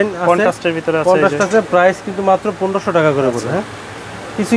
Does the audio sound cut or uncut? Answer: uncut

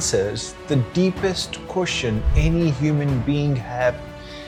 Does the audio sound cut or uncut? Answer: uncut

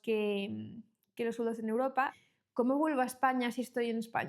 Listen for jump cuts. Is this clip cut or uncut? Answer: cut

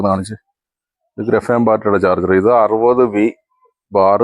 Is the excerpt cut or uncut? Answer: uncut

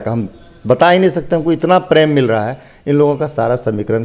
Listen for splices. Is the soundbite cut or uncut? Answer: uncut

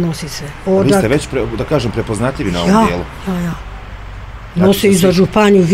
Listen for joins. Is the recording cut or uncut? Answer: uncut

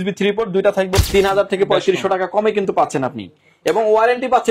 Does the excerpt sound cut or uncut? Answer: cut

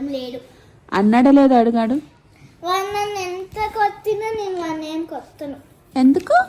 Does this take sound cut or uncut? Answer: uncut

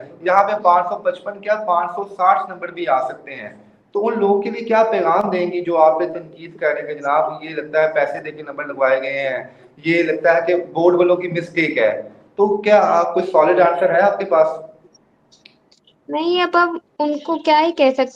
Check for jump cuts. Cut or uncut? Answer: uncut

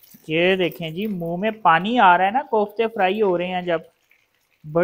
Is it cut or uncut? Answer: uncut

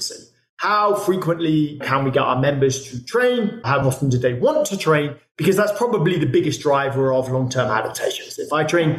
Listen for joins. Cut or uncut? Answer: cut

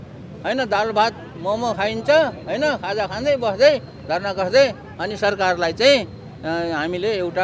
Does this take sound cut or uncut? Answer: uncut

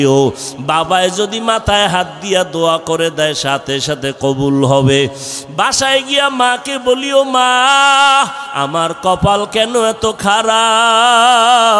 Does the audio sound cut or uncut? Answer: cut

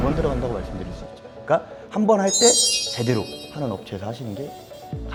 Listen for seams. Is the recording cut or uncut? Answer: uncut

